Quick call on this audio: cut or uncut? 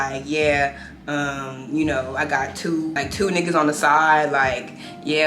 uncut